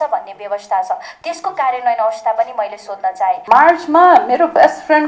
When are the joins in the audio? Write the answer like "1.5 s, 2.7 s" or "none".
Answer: 3.4 s